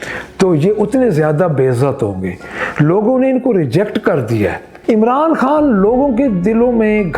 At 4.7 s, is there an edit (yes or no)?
yes